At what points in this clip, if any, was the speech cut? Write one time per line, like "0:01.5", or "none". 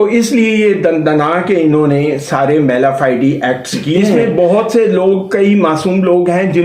0:04.1

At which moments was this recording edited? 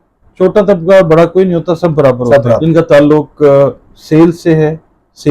0:02.6

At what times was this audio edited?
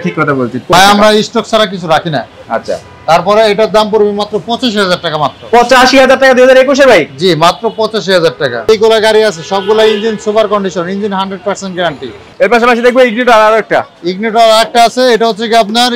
0:00.7
0:08.7
0:12.2

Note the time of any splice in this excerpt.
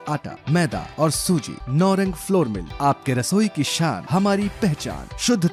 none

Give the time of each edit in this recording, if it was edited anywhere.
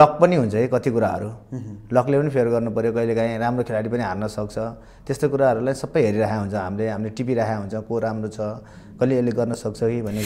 none

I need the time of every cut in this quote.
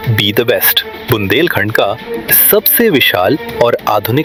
none

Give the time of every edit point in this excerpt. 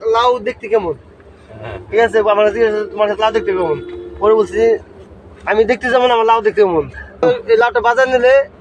none

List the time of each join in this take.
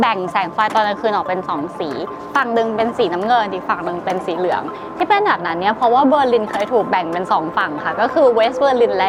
none

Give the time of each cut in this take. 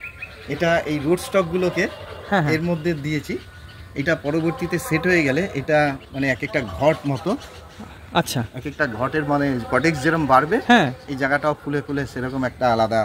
none

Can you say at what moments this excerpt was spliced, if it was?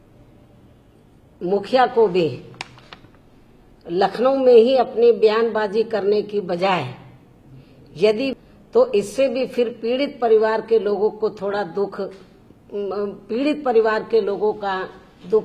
0:08.3

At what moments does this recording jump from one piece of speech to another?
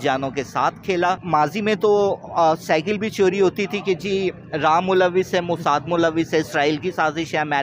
0:01.2

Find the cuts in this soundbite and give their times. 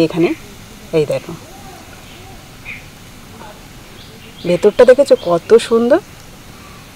0:03.4

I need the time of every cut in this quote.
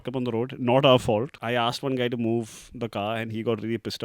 0:01.4

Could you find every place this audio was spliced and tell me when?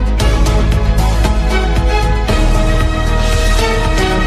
none

